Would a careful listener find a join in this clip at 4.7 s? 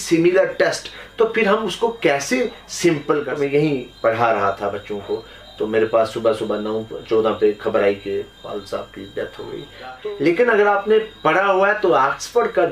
no; 2 cuts; at 3.3 s, 10.0 s

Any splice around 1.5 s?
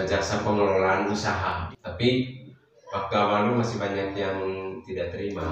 yes; 1 cut; at 1.5 s

